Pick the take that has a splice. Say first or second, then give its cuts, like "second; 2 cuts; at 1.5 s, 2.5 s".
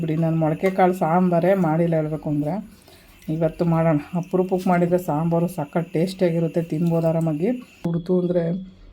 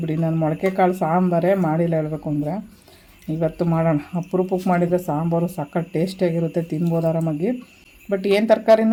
first; 1 cut; at 7.9 s